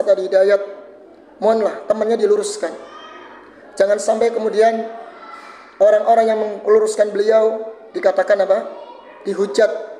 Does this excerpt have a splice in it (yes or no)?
no